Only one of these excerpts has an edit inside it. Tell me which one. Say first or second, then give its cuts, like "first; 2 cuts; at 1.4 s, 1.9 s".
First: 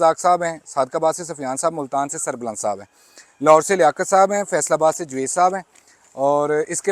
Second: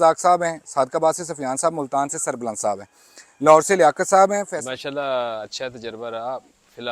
second; 1 cut; at 4.5 s